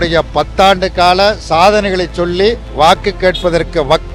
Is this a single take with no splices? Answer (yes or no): yes